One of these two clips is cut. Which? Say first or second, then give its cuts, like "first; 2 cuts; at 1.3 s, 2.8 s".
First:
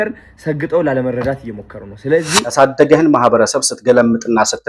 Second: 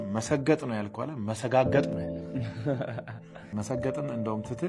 first; 1 cut; at 2.4 s